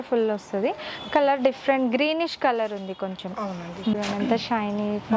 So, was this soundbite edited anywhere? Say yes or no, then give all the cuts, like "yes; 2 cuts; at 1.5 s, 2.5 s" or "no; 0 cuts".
yes; 1 cut; at 3.9 s